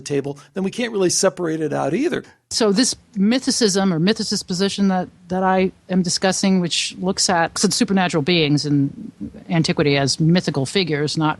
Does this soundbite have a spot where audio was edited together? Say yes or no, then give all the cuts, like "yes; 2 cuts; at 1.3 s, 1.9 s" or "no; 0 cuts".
yes; 2 cuts; at 2.3 s, 7.6 s